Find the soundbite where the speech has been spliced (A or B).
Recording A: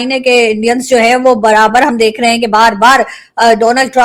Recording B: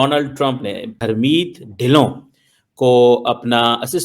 B